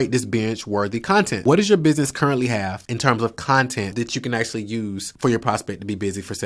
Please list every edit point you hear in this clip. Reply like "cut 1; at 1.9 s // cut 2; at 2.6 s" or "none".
cut 1; at 1.4 s // cut 2; at 2.8 s // cut 3; at 3.9 s // cut 4; at 5.1 s